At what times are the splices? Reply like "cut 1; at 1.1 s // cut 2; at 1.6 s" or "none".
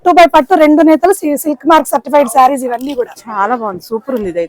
none